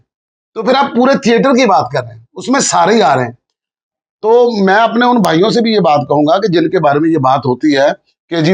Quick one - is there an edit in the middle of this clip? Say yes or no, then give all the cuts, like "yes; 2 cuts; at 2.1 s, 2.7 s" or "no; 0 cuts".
no; 0 cuts